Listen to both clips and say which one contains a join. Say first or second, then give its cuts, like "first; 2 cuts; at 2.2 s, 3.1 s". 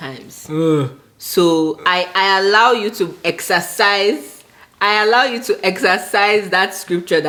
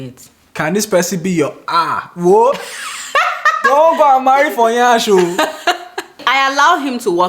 second; 1 cut; at 6.2 s